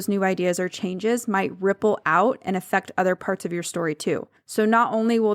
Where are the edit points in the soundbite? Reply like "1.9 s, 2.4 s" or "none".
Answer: 4.4 s